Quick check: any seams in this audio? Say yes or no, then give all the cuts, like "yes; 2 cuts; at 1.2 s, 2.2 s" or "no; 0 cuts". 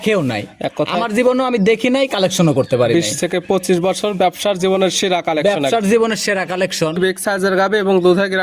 yes; 1 cut; at 7.0 s